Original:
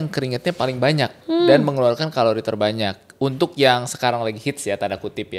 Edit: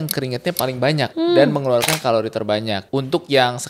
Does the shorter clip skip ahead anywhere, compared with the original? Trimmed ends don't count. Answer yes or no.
yes